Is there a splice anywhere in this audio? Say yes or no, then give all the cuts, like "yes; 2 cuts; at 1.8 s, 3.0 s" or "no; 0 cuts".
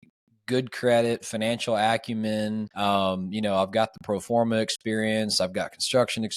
yes; 1 cut; at 2.7 s